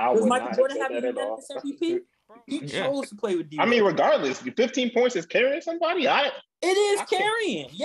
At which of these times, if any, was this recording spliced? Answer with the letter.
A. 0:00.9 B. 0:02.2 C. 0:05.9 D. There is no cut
B